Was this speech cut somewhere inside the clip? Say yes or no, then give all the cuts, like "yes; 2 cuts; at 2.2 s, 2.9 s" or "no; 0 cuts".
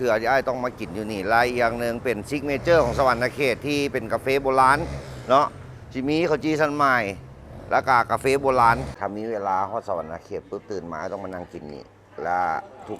yes; 1 cut; at 8.9 s